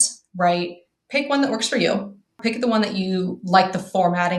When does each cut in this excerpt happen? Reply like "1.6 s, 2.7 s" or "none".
2.4 s